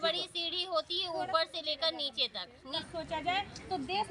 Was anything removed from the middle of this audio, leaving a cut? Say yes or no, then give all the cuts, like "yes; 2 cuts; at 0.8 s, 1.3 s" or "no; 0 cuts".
yes; 1 cut; at 2.8 s